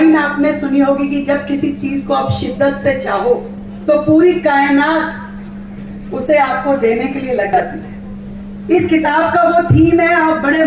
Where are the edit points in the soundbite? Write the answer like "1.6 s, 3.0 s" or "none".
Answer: none